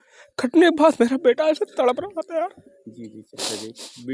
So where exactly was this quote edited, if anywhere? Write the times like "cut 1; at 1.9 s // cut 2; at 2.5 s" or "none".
none

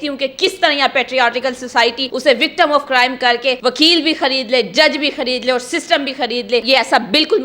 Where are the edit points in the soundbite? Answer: cut 1; at 2.1 s // cut 2; at 3.6 s // cut 3; at 6.6 s

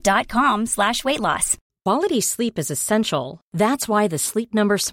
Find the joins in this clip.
cut 1; at 1.6 s

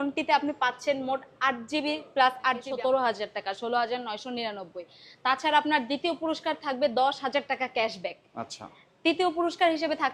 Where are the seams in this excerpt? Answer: cut 1; at 2.7 s

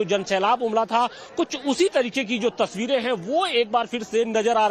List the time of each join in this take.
cut 1; at 3.0 s

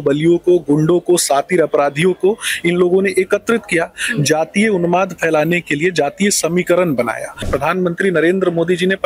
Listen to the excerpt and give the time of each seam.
cut 1; at 7.4 s

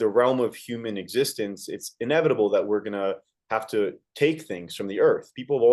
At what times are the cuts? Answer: none

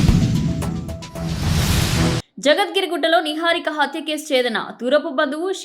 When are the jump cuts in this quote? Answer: cut 1; at 2.3 s

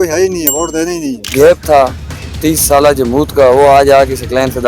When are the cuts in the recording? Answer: cut 1; at 1.2 s

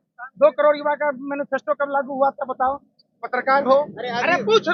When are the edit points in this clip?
none

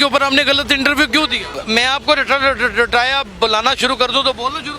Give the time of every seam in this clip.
cut 1; at 1.5 s

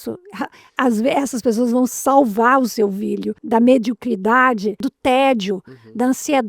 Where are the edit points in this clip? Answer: cut 1; at 3.4 s // cut 2; at 4.9 s

